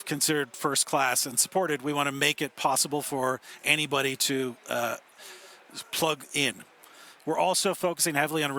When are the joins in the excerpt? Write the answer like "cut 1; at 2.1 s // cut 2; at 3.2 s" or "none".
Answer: none

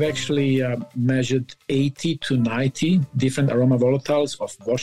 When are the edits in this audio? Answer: none

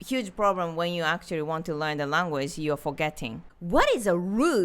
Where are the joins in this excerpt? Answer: cut 1; at 3.5 s

